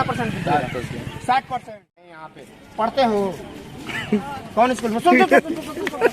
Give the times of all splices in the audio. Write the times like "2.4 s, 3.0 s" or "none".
2.2 s